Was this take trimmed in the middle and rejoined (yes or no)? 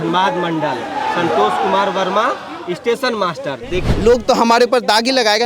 yes